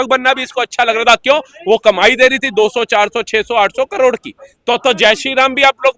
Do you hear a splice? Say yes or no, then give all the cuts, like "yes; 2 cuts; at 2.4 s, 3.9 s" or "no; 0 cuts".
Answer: no; 0 cuts